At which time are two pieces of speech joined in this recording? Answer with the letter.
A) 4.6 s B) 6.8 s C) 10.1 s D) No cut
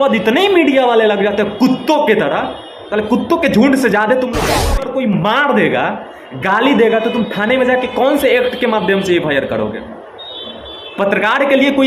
A